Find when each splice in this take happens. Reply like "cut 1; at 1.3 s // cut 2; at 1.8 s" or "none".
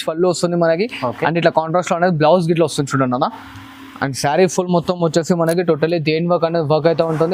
none

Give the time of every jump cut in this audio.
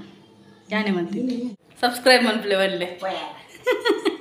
cut 1; at 1.6 s

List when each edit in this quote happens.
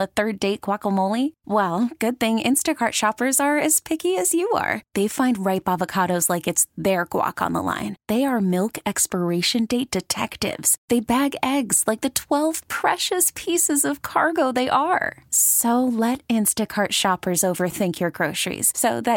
none

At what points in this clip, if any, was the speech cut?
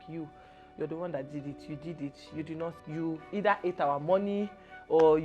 cut 1; at 2.8 s

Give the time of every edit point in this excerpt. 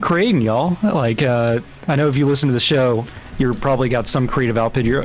none

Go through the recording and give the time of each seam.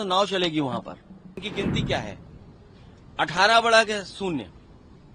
cut 1; at 1.5 s

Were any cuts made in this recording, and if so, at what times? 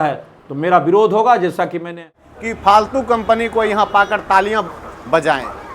cut 1; at 2.3 s

